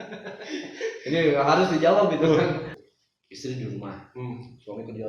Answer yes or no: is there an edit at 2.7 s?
yes